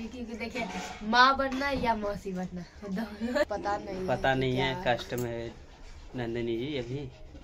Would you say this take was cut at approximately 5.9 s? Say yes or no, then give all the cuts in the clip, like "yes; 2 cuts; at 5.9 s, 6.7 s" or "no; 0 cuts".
no; 1 cut; at 3.4 s